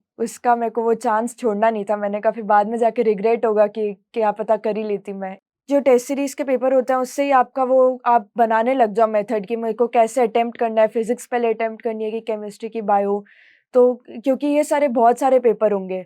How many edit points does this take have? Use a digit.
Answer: 1